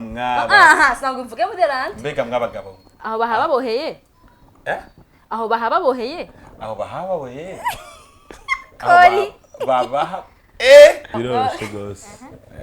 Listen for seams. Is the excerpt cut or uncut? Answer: cut